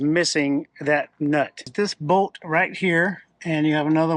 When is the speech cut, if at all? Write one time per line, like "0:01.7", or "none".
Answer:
0:01.7